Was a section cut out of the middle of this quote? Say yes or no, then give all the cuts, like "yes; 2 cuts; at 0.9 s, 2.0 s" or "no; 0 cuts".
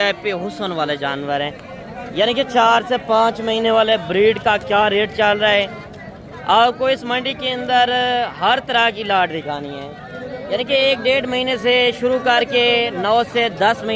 no; 0 cuts